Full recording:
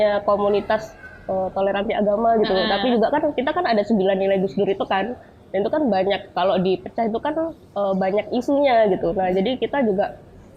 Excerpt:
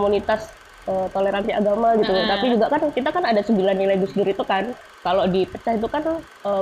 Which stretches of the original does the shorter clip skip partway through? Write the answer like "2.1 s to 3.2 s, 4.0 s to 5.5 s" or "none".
5.4 s to 6.3 s